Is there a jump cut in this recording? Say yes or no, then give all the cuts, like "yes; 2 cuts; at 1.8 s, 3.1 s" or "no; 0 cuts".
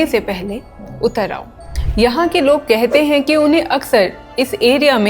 yes; 1 cut; at 1.7 s